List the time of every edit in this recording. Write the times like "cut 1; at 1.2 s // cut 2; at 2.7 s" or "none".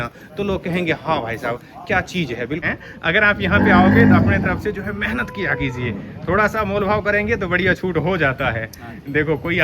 cut 1; at 2.6 s